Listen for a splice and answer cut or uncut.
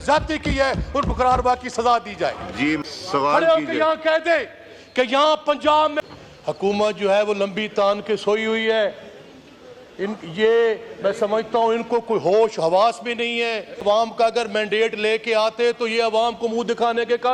cut